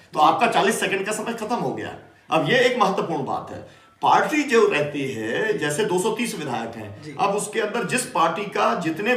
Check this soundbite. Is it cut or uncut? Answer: uncut